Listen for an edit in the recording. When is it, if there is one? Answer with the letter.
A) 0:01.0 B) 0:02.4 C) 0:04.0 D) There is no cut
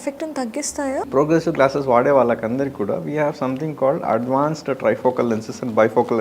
A